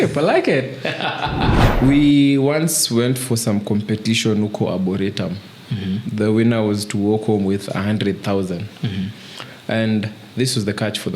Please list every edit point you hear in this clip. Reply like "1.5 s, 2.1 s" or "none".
1.7 s

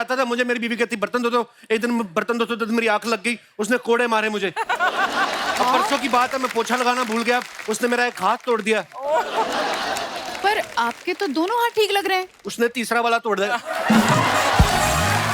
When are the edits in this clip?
none

